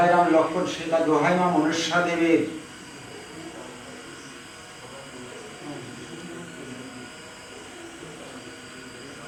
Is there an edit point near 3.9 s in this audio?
no; 0 cuts

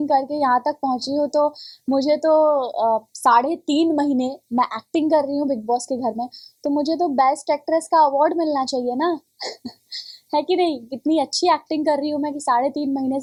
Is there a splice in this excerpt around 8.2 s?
no; 0 cuts

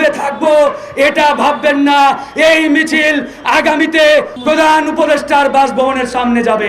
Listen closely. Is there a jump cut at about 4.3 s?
yes; 1 cut; at 4.3 s

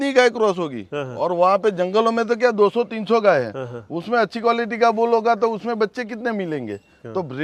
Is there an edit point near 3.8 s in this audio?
no; 0 cuts

